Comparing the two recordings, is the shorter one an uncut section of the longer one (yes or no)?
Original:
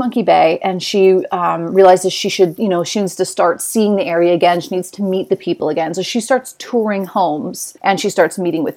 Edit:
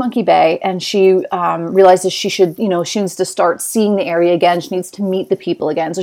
yes